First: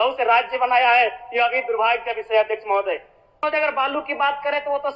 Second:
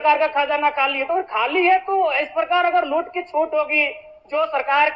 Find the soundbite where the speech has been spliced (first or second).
first